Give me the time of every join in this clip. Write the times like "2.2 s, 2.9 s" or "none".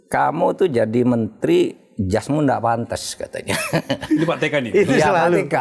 none